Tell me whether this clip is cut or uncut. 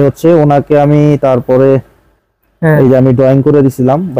uncut